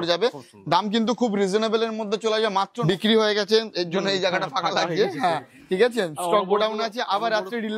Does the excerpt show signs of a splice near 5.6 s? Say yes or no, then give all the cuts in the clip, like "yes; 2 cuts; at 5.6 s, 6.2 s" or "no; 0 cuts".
no; 1 cut; at 2.8 s